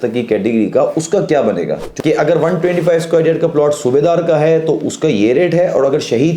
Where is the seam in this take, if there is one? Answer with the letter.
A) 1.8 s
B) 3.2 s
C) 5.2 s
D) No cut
A